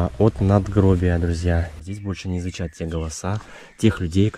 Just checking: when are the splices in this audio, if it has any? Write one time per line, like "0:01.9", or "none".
0:01.7